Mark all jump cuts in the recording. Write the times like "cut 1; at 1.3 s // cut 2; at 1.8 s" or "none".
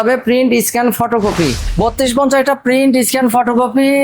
cut 1; at 1.6 s